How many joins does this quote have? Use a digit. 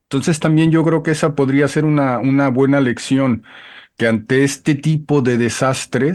0